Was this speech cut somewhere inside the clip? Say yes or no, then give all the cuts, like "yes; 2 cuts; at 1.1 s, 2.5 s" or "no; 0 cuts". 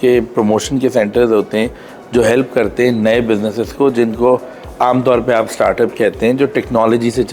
no; 0 cuts